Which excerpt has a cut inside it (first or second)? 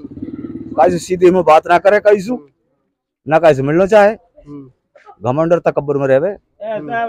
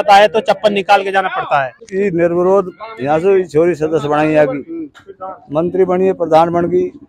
second